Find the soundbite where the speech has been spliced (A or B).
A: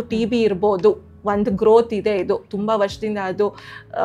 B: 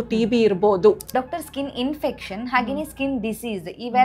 B